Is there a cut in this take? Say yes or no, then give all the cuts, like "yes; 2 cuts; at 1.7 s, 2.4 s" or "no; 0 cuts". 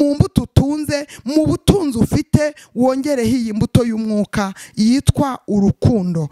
no; 0 cuts